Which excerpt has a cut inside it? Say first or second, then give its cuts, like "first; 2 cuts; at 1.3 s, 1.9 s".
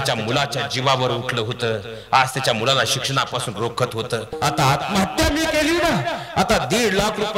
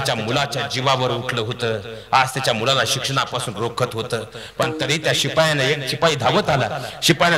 first; 1 cut; at 4.4 s